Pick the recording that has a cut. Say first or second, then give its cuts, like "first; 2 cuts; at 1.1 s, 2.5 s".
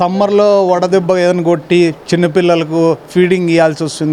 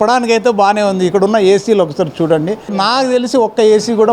second; 1 cut; at 2.8 s